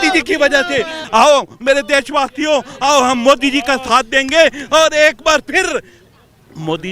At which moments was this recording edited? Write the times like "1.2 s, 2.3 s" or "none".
1.0 s